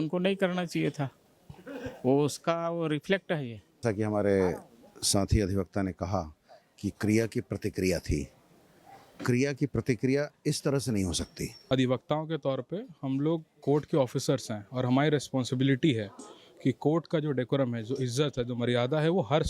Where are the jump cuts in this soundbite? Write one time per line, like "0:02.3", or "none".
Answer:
0:03.8
0:11.6